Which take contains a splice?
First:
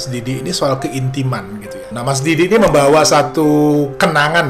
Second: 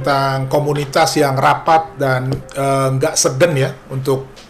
first; 1 cut; at 1.9 s

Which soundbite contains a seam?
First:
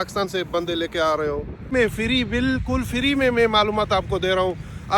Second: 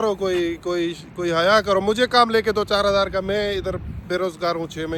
first; 1 cut; at 1.7 s

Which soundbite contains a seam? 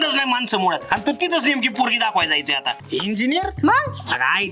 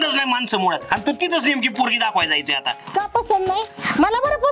first; 1 cut; at 2.7 s

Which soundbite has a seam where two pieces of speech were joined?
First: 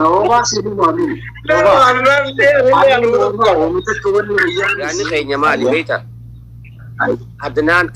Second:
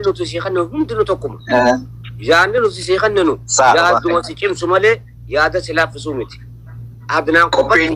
first; 1 cut; at 4.8 s

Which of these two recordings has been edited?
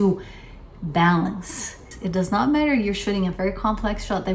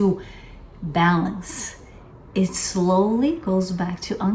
first; 1 cut; at 1.9 s

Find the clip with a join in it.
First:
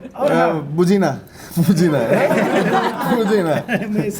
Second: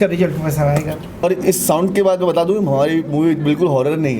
second; 1 cut; at 1.2 s

